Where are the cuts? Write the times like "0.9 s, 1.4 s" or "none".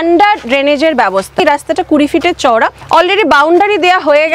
1.4 s, 2.8 s